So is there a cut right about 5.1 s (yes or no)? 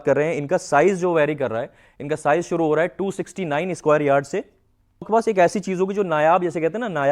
yes